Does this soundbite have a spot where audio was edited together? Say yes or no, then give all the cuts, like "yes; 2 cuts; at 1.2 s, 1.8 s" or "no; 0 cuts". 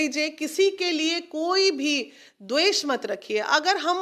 no; 0 cuts